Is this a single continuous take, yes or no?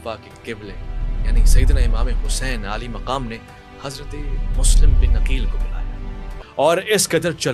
no